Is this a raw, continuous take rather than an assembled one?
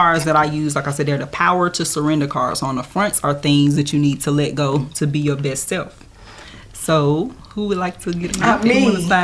no; 1 cut; at 8.3 s

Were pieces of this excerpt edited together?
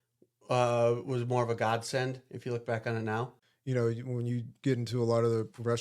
yes; 1 cut; at 3.4 s

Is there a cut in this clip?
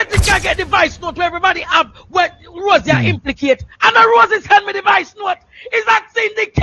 no; 0 cuts

